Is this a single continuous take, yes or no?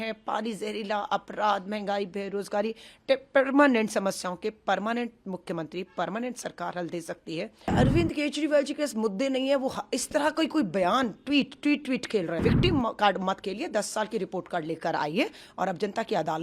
no